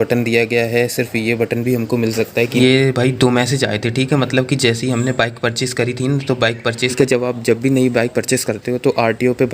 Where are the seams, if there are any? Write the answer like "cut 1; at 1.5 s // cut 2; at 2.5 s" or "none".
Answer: cut 1; at 2.6 s // cut 2; at 6.9 s